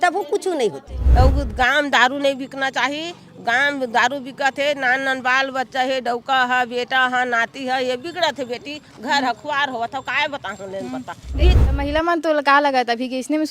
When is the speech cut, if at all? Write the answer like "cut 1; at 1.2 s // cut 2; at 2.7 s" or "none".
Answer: cut 1; at 1.0 s // cut 2; at 11.6 s